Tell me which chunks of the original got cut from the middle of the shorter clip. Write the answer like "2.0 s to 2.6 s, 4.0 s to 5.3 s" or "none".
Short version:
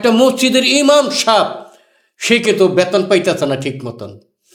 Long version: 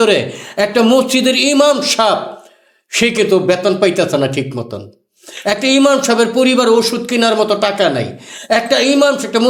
none